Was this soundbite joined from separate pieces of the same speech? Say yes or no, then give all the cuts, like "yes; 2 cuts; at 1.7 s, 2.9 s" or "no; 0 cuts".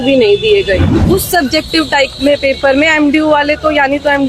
yes; 1 cut; at 0.9 s